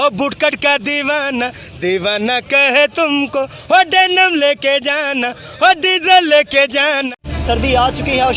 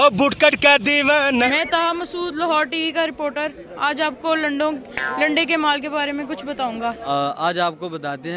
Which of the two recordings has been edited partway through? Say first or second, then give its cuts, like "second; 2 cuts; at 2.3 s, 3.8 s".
second; 2 cuts; at 1.5 s, 7.0 s